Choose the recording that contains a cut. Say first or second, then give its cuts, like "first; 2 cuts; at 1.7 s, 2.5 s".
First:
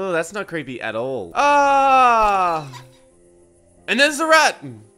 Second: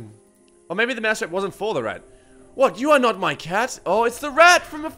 first; 1 cut; at 1.3 s